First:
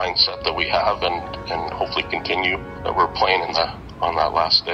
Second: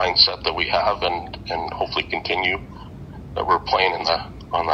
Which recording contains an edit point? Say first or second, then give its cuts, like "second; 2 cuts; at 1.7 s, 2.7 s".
first; 1 cut; at 2.7 s